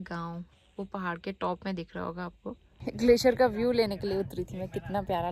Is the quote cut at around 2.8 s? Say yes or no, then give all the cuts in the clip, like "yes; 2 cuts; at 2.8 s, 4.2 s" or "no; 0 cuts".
yes; 1 cut; at 2.8 s